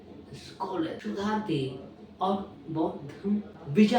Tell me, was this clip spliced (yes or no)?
yes